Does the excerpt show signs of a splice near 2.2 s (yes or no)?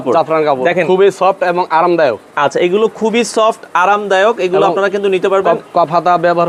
no